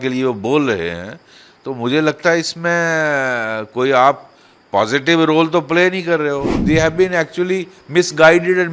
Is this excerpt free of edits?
no; 1 cut; at 6.5 s

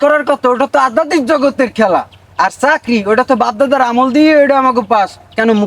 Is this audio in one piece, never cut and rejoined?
yes; 0 cuts

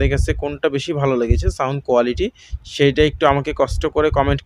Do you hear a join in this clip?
no; 0 cuts

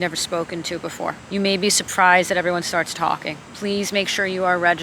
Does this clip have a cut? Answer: yes; 2 cuts; at 1.2 s, 3.4 s

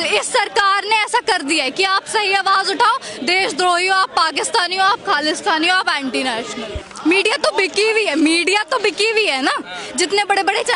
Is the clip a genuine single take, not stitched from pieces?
no; 1 cut; at 6.8 s

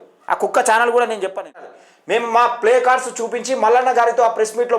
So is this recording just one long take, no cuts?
no; 1 cut; at 1.7 s

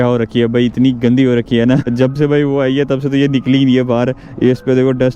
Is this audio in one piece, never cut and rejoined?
no; 1 cut; at 1.8 s

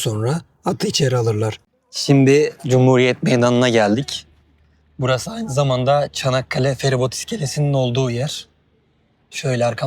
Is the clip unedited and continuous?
no; 1 cut; at 1.6 s

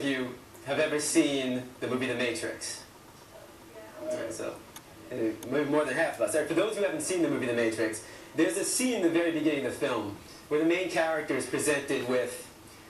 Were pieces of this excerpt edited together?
yes; 1 cut; at 6.7 s

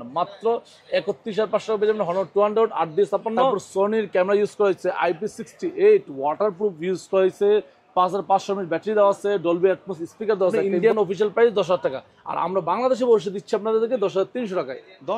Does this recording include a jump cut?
yes; 2 cuts; at 3.6 s, 10.7 s

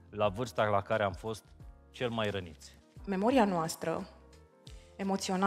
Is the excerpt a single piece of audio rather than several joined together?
no; 1 cut; at 3.0 s

